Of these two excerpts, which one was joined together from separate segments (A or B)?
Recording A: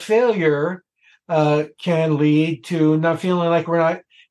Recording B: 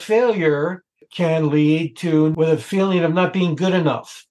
B